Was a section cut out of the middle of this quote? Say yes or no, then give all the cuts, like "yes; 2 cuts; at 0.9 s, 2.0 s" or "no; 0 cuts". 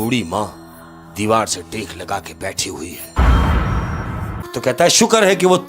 yes; 1 cut; at 4.5 s